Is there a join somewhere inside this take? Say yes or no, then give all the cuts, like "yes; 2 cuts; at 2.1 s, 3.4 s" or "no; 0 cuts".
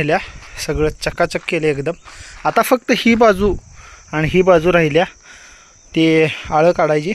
no; 0 cuts